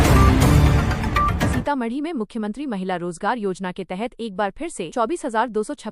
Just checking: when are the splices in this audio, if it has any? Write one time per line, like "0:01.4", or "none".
0:01.4